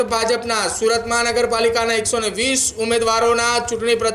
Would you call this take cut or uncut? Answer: uncut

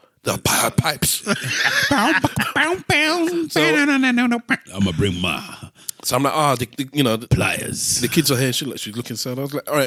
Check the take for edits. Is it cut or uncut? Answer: uncut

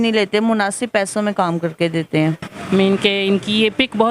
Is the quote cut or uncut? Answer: cut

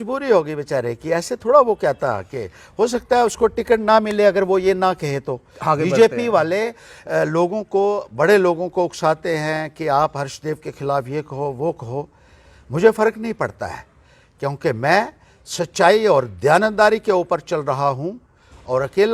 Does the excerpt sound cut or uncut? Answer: uncut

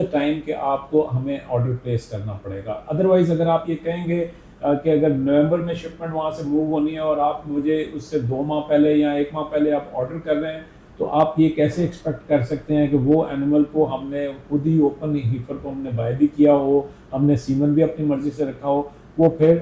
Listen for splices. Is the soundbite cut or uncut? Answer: uncut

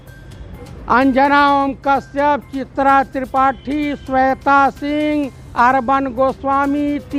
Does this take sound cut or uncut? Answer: uncut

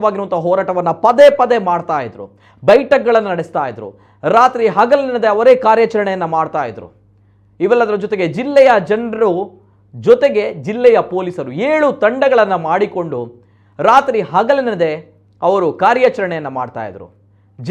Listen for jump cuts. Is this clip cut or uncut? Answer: uncut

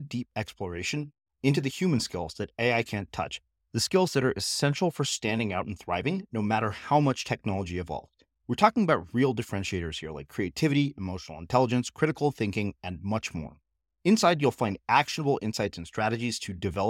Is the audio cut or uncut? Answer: uncut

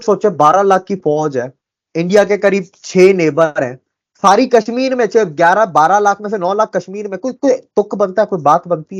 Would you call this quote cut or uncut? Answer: uncut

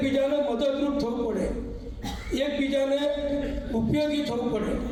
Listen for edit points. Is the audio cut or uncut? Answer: uncut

